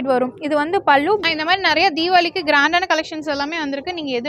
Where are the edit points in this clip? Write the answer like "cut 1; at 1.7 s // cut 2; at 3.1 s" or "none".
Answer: cut 1; at 1.2 s